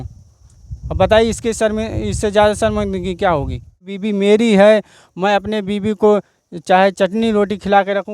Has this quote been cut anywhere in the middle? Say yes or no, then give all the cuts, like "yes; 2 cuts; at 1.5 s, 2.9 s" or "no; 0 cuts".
yes; 1 cut; at 3.9 s